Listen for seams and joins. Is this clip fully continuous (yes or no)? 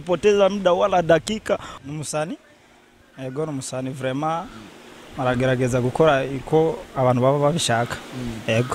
no